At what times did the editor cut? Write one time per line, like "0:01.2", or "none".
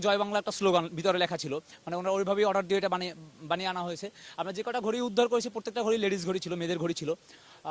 none